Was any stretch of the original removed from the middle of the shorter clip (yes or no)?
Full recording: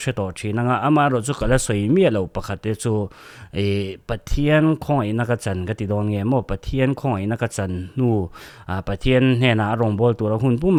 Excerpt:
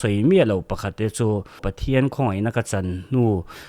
yes